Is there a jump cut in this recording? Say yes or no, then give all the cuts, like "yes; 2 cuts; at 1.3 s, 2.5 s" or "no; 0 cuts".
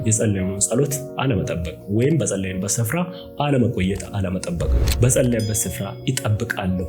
no; 0 cuts